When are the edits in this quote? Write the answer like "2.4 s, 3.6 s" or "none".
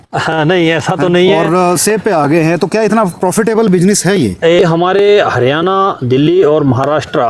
4.6 s